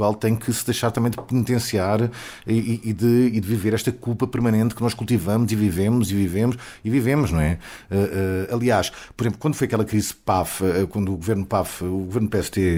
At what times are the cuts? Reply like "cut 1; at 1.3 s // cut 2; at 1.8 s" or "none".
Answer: none